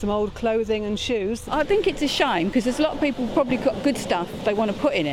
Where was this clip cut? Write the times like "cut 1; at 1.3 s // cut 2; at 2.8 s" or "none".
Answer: cut 1; at 1.4 s